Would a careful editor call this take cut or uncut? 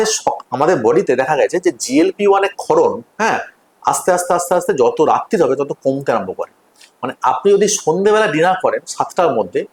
uncut